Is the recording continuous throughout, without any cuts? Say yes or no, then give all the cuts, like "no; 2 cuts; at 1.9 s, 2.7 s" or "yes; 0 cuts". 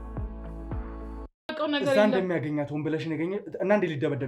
no; 1 cut; at 1.5 s